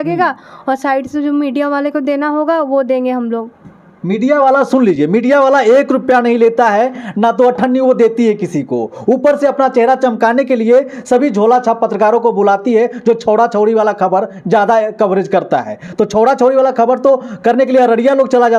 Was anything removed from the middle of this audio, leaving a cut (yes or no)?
no